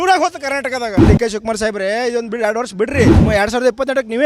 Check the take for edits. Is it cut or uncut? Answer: cut